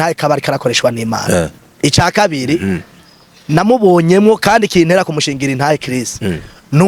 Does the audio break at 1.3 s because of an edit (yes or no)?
yes